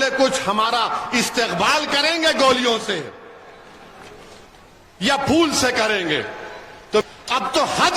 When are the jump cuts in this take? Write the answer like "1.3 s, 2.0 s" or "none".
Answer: 7.0 s

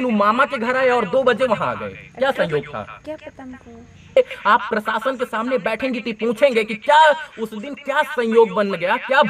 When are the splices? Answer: 4.2 s

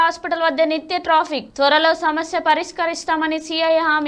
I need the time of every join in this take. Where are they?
none

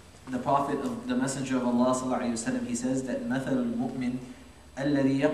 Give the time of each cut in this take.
4.0 s

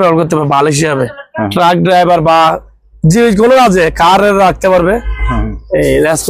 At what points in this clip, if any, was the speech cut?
none

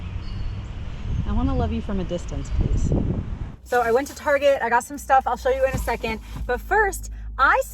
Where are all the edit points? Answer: 3.6 s

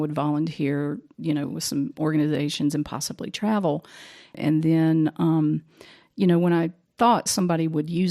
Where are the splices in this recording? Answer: 4.4 s

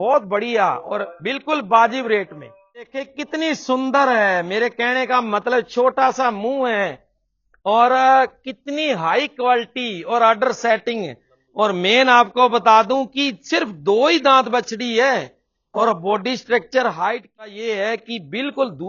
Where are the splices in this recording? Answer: 3.1 s, 17.6 s

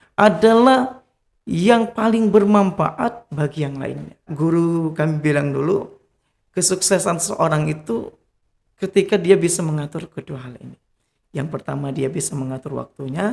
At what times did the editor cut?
4.3 s

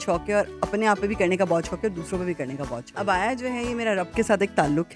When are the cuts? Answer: 2.9 s

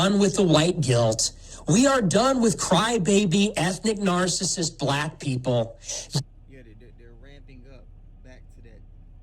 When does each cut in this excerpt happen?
none

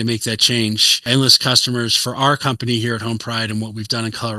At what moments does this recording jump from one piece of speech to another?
0.9 s

